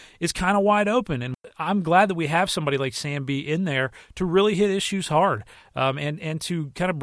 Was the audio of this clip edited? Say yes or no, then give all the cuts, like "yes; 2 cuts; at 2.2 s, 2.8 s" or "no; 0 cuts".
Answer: yes; 1 cut; at 1.4 s